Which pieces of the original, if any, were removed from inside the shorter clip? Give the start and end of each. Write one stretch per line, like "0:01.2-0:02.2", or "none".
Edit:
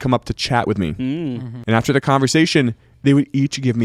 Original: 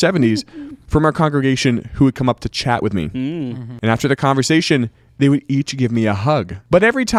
none